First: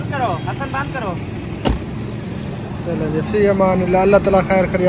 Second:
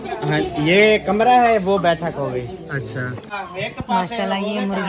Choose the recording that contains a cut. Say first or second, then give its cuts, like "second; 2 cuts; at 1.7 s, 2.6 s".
second; 1 cut; at 3.2 s